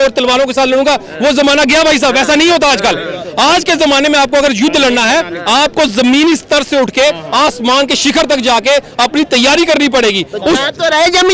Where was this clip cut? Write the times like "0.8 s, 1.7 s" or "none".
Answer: none